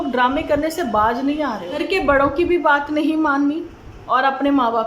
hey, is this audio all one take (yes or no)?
no